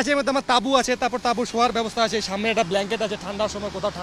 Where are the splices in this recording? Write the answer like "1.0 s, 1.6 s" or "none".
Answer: none